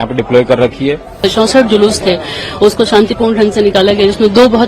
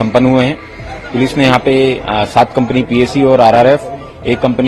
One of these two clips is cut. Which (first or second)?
first